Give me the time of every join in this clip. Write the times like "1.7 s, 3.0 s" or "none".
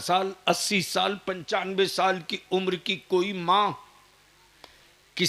none